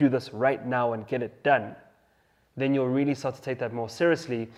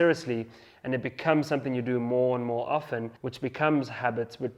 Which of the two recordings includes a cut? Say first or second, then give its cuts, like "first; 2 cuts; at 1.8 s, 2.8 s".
second; 1 cut; at 3.2 s